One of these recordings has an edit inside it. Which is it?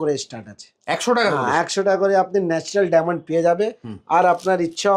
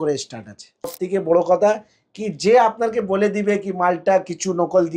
second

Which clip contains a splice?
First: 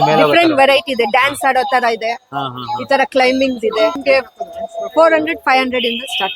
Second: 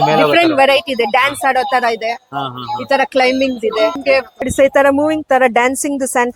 second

